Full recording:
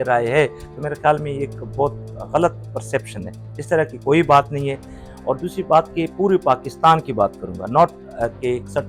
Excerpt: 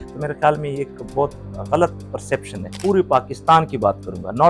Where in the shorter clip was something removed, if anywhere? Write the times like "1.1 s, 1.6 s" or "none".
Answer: 2.8 s